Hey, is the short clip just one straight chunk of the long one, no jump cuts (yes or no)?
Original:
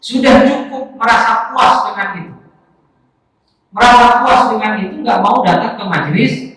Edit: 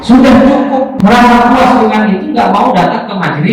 no